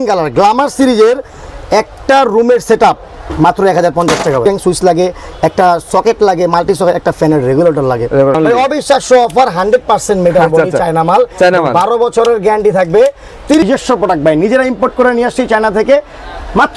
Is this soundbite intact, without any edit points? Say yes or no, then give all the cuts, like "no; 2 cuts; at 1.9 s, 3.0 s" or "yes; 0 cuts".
no; 3 cuts; at 4.4 s, 8.4 s, 13.6 s